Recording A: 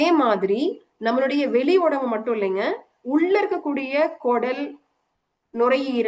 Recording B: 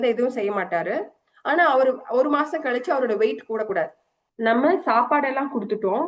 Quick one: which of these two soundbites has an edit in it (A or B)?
B